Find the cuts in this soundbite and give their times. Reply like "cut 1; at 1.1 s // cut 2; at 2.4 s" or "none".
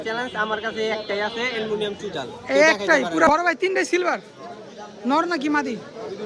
cut 1; at 3.3 s

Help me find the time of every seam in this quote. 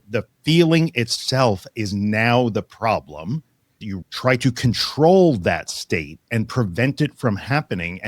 cut 1; at 3.9 s

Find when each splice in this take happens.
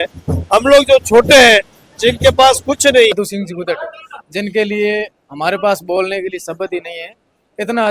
cut 1; at 3.1 s

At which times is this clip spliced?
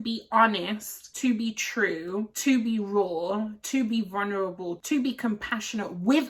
none

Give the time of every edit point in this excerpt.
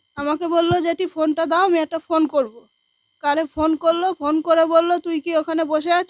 none

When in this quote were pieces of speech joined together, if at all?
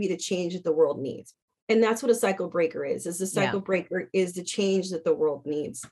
none

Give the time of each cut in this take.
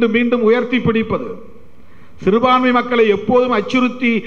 none

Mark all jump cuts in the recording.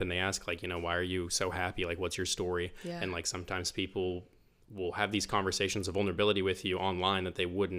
none

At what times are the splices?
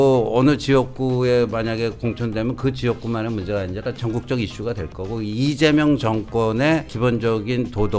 cut 1; at 6.9 s

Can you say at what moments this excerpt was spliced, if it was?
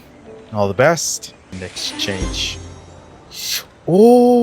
cut 1; at 1.6 s

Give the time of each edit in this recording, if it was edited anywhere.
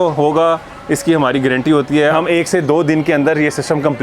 cut 1; at 2.1 s

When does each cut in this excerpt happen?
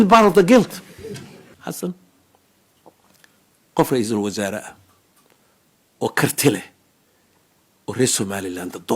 cut 1; at 1.4 s

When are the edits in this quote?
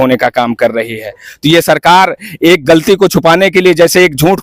none

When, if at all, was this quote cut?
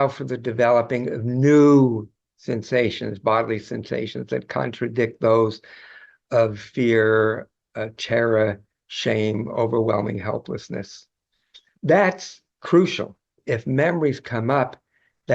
cut 1; at 13.4 s

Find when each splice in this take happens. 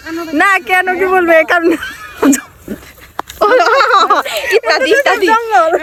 none

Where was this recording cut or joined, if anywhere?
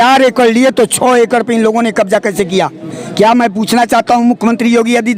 none

